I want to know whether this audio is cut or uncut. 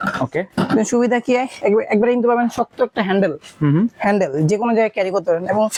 uncut